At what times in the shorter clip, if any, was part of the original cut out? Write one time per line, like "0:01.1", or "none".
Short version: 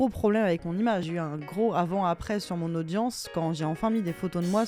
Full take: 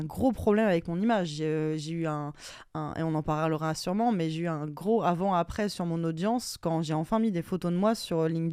0:01.1